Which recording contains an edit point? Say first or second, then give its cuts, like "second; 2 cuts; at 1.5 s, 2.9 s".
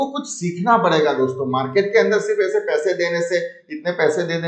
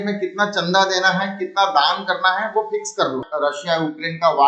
second; 1 cut; at 3.3 s